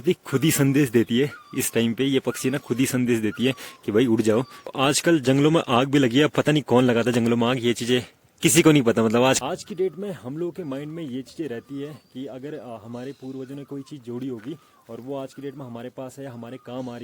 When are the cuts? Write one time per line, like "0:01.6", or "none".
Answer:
0:04.7
0:09.4